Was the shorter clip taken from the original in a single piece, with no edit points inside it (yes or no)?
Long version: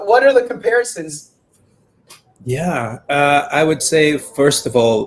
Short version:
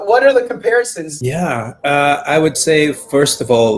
no